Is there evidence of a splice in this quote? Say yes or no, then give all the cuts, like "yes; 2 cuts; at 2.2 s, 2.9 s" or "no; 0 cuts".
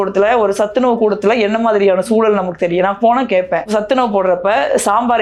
no; 0 cuts